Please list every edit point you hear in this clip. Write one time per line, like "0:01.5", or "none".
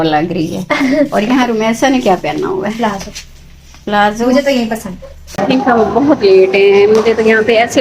0:05.4

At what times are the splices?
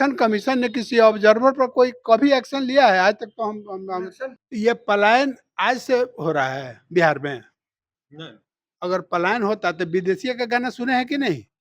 0:04.4

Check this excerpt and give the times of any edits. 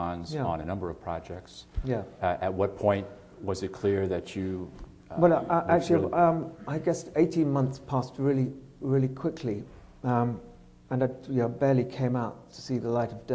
0:08.2

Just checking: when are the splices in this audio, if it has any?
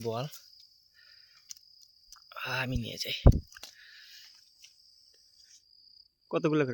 0:05.6

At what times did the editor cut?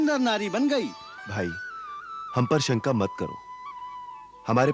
0:01.1

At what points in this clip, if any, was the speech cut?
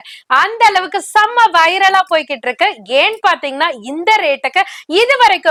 none

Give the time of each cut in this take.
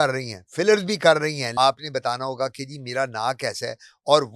0:01.4

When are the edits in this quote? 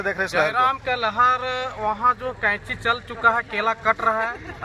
none

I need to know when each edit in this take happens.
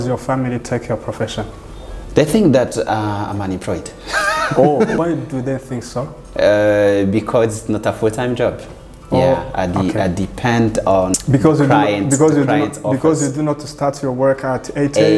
none

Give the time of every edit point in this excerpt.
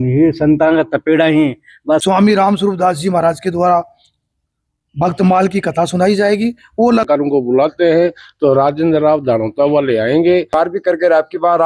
0:02.0
0:07.1
0:10.5

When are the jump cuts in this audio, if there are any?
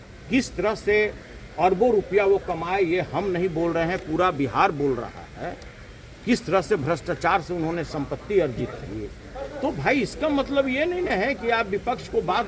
none

